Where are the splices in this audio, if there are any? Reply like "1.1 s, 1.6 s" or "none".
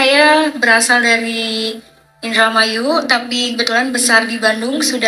none